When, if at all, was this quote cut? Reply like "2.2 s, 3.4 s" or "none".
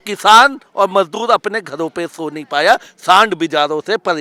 none